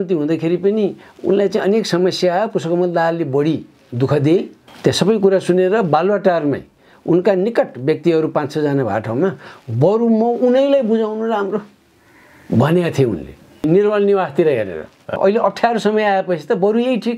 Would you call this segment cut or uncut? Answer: cut